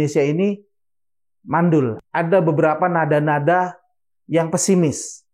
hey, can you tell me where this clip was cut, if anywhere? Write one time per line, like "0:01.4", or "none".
0:02.0